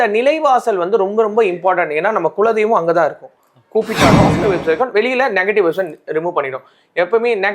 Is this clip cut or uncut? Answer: cut